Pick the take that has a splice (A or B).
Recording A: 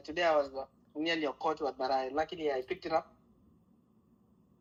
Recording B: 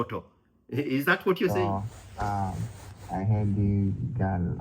B